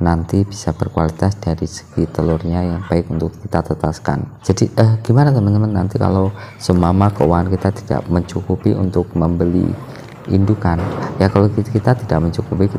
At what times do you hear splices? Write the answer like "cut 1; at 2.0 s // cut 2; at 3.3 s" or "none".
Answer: cut 1; at 4.3 s